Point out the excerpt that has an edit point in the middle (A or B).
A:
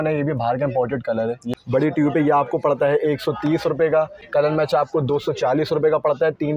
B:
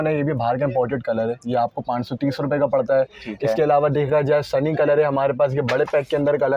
A